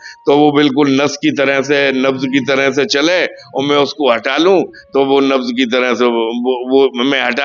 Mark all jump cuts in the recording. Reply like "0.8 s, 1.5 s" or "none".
none